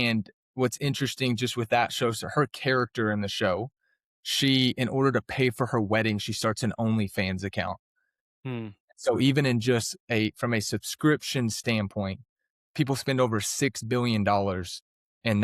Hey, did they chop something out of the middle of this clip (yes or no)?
yes